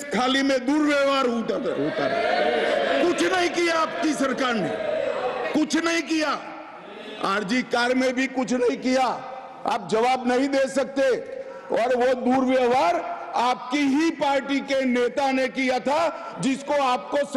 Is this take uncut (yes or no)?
yes